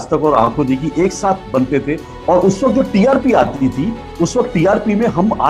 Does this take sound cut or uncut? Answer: cut